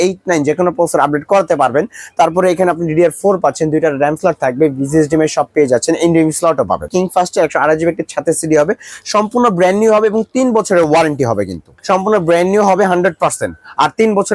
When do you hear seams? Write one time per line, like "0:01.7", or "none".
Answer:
0:06.9
0:11.7